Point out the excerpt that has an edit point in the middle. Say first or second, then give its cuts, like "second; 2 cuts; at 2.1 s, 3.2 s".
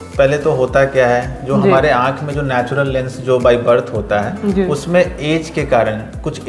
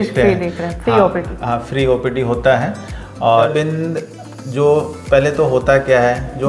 second; 1 cut; at 3.5 s